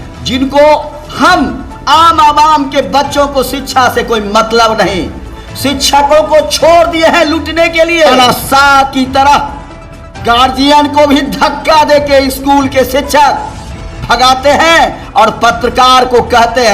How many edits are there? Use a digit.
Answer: 1